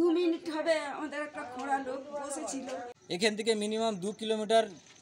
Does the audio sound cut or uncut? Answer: cut